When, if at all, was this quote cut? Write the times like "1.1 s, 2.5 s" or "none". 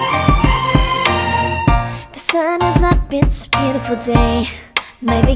1.7 s